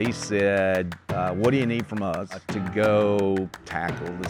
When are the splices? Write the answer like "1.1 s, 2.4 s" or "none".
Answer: 1.0 s, 2.5 s